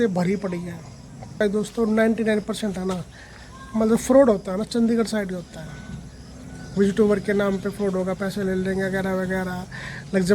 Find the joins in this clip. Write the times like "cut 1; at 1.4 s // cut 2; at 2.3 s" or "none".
cut 1; at 1.4 s